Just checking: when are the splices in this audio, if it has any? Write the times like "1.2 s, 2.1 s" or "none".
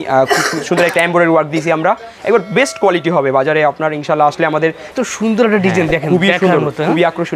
4.9 s